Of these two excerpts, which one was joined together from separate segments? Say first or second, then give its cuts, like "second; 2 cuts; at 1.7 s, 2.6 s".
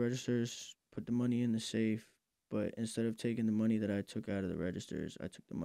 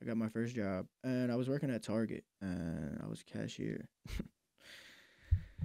second; 3 cuts; at 0.9 s, 2.3 s, 4.0 s